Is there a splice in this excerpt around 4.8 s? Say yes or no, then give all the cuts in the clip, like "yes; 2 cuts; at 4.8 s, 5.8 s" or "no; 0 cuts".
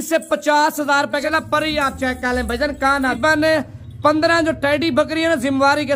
no; 2 cuts; at 1.2 s, 3.2 s